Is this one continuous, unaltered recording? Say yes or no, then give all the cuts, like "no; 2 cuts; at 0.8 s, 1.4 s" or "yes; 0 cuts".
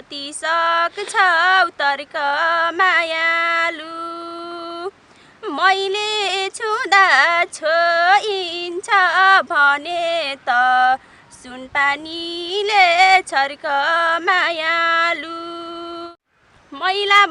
no; 1 cut; at 16.1 s